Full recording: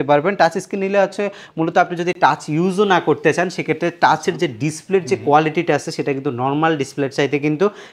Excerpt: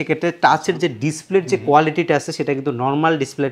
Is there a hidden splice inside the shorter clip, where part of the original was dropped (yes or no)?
no